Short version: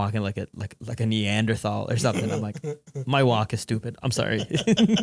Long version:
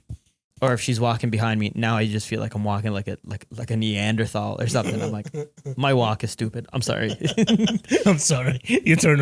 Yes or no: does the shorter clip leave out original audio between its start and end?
no